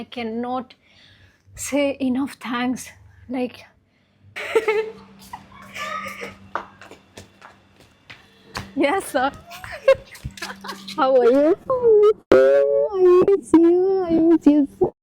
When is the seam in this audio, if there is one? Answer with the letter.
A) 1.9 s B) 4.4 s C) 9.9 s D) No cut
B